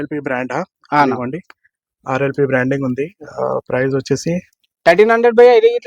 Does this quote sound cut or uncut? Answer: uncut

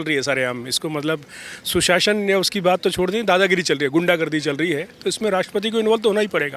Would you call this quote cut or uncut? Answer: uncut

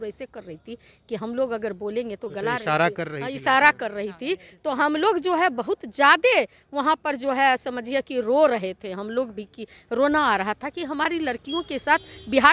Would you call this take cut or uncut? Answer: uncut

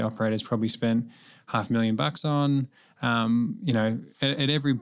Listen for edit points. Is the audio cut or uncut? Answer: uncut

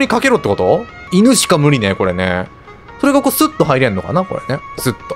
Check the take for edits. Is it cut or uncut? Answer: uncut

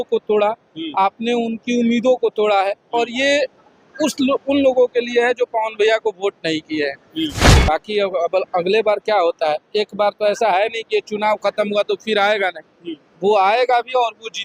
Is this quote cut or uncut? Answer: cut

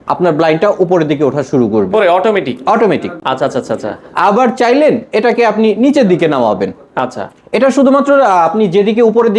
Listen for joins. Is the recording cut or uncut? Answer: uncut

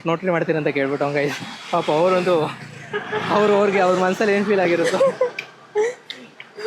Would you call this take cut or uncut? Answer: uncut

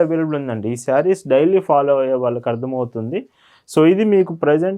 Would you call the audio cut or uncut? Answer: uncut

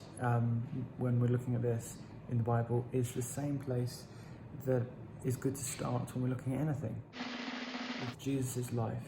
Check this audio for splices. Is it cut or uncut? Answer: cut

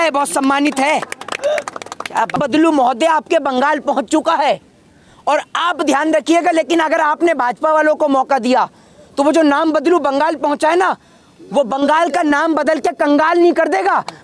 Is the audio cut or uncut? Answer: cut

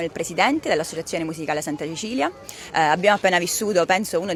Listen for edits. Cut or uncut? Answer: uncut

